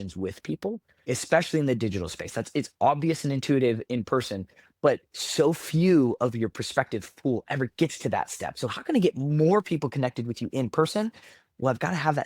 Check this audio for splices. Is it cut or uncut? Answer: cut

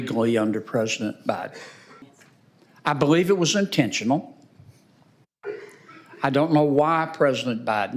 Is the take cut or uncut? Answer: cut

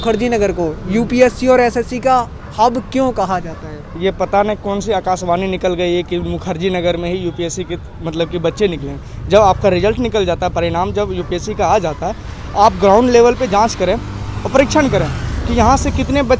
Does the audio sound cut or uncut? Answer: uncut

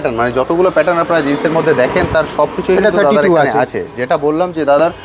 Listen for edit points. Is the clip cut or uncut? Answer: uncut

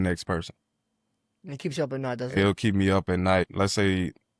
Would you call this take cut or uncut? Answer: cut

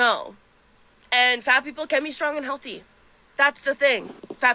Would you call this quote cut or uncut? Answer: cut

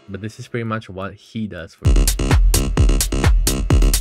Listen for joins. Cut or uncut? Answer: cut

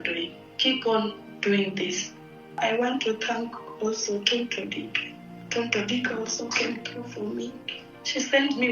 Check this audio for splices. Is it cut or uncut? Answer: cut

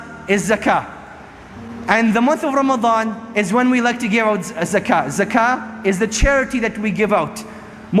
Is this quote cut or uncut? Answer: uncut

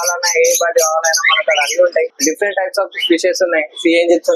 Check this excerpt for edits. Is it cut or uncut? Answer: cut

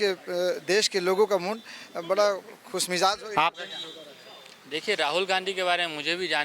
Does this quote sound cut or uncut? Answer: uncut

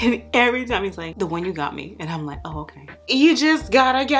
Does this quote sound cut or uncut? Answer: cut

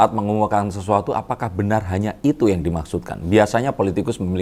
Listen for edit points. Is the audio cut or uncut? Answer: uncut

